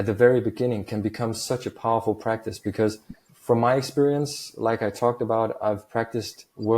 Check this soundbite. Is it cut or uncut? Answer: cut